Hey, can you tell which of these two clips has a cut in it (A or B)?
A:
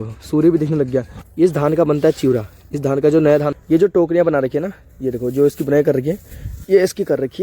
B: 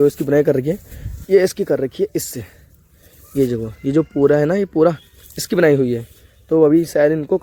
A